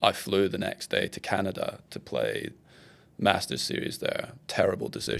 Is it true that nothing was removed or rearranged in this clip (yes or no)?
yes